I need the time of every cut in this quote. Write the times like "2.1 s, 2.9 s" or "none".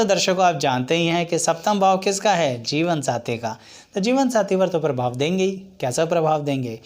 none